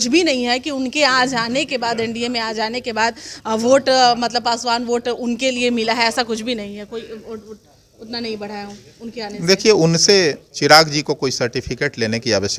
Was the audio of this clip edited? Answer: no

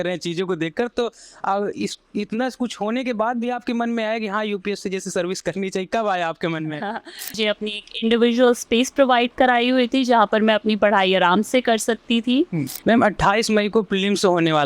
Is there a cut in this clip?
yes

